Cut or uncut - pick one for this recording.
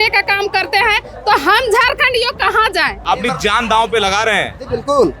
cut